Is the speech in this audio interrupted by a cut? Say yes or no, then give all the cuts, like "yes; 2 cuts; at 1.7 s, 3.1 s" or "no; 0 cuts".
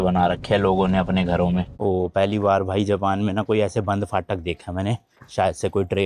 yes; 1 cut; at 1.7 s